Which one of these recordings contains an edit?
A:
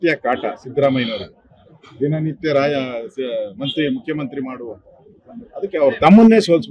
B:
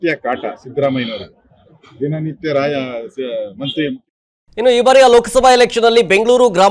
A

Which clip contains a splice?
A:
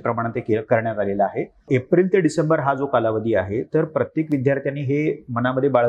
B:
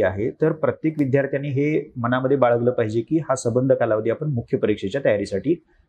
A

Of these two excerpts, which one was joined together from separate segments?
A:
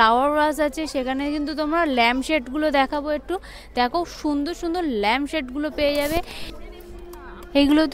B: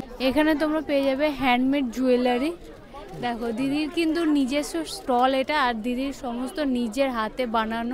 A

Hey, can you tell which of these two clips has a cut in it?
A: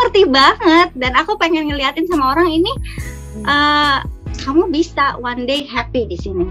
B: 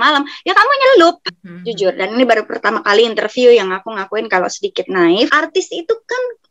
B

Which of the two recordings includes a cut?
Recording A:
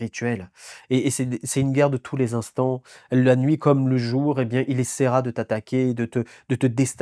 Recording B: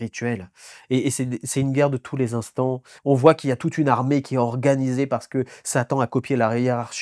B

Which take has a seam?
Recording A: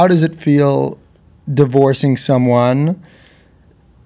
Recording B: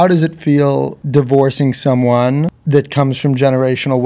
B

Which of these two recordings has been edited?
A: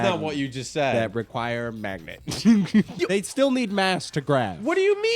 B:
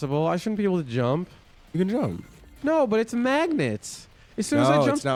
A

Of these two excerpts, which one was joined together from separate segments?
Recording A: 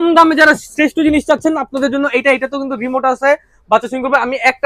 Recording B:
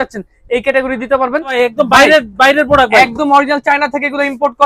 B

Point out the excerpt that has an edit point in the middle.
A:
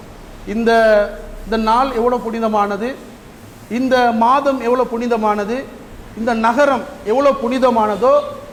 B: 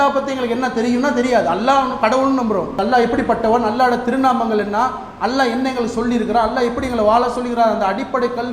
B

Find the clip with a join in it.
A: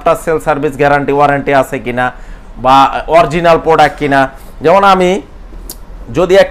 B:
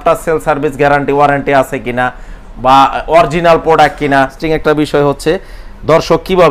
B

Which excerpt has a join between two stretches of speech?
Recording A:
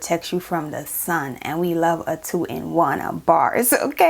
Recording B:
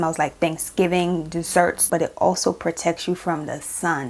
B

